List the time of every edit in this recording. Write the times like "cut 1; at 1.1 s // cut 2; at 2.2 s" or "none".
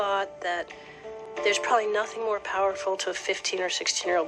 none